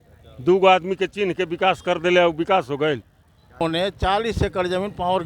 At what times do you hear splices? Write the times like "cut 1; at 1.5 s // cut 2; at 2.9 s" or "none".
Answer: cut 1; at 3.6 s